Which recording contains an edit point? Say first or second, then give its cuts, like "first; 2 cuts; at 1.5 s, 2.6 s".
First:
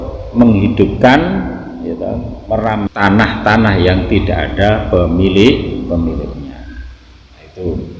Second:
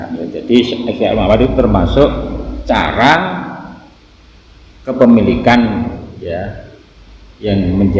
first; 1 cut; at 2.9 s